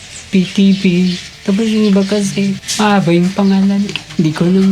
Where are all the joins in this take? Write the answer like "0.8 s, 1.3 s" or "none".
2.6 s